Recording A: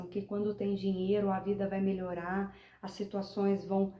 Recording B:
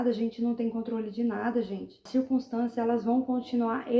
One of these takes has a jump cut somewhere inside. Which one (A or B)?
B